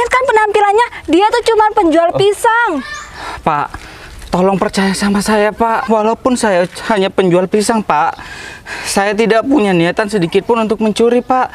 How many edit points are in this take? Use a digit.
1